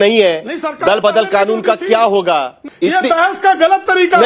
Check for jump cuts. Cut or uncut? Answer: cut